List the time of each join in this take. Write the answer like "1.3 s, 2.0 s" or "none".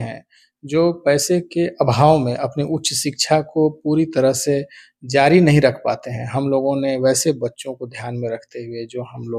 none